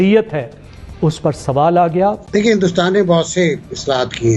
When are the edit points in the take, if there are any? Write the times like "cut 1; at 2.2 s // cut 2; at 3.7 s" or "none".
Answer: cut 1; at 2.2 s